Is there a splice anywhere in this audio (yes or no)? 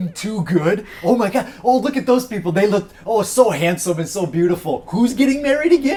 no